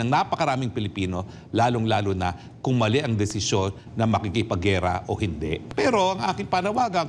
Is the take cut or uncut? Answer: cut